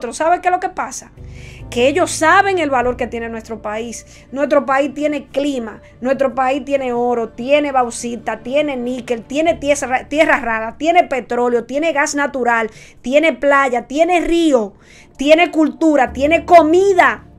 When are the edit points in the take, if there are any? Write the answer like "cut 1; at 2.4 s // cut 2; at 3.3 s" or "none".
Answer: none